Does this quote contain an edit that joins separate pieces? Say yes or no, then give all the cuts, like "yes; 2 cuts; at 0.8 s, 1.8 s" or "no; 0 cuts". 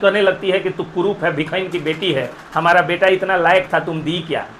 no; 0 cuts